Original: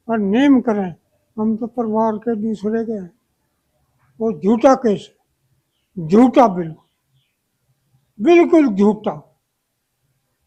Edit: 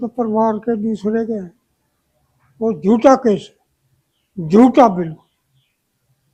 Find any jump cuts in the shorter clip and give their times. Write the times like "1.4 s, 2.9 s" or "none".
none